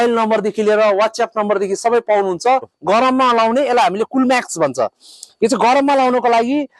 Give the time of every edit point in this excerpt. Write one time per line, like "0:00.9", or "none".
0:02.7